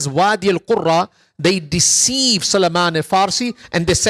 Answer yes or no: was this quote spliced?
no